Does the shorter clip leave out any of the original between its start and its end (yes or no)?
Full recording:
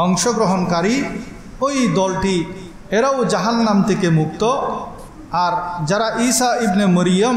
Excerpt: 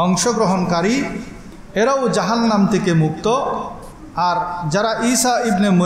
yes